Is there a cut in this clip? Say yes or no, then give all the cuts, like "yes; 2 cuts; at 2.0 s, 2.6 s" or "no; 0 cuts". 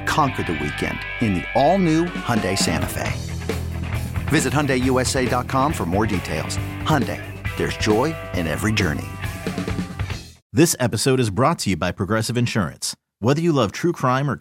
yes; 1 cut; at 10.4 s